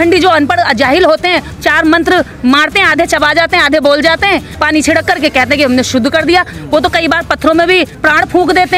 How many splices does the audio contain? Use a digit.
3